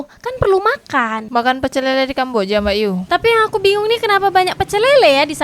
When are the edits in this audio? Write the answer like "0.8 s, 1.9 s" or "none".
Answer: none